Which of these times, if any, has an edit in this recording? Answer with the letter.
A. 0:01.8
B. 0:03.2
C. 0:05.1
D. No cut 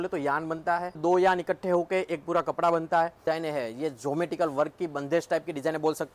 B